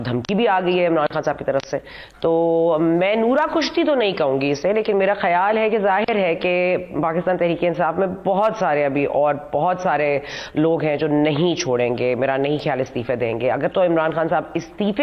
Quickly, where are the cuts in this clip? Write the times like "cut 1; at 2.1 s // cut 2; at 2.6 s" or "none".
none

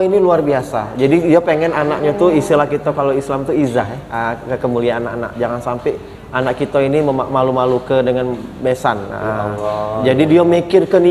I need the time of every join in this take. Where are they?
none

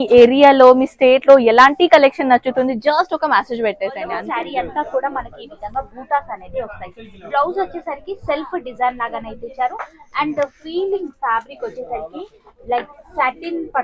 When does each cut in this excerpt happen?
cut 1; at 4.1 s

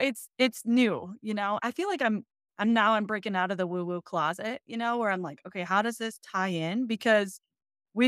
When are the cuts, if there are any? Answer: cut 1; at 1.6 s

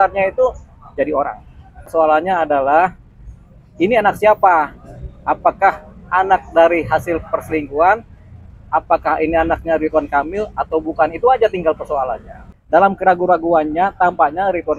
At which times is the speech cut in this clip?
cut 1; at 1.9 s // cut 2; at 12.4 s

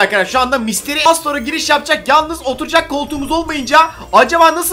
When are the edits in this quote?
cut 1; at 1.1 s

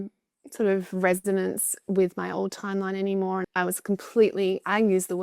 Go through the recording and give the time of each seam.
cut 1; at 3.4 s

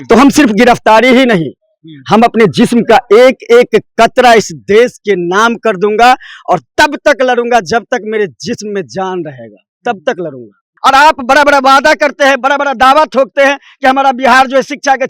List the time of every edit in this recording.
cut 1; at 10.7 s

